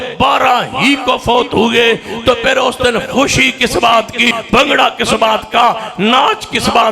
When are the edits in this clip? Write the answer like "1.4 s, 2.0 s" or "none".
4.3 s